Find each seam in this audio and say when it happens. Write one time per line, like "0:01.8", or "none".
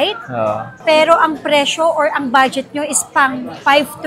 none